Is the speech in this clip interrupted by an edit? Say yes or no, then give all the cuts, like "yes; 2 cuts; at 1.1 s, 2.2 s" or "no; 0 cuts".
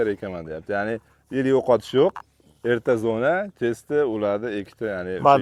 no; 0 cuts